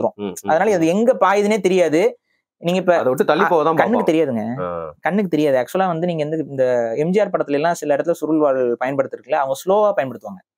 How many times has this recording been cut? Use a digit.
0